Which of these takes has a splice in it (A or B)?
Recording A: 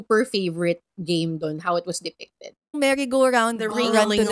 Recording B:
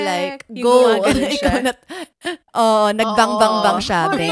A